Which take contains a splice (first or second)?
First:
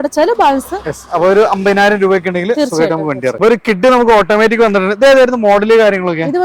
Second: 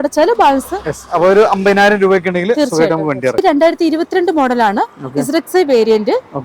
second